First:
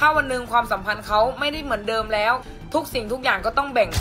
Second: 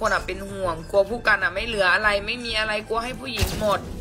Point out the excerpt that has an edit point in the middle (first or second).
first